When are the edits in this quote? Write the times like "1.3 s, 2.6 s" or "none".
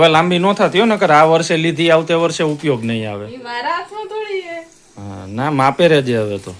none